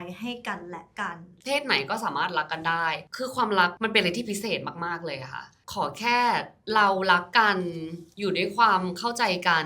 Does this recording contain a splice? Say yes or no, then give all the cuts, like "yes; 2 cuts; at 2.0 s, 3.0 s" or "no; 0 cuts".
yes; 2 cuts; at 1.4 s, 5.6 s